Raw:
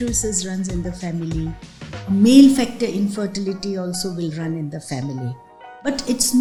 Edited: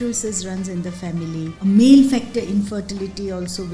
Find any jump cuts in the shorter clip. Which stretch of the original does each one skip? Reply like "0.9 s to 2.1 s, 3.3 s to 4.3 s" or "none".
1.5 s to 2.0 s